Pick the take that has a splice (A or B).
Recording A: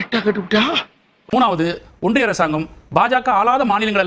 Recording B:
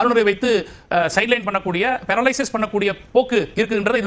A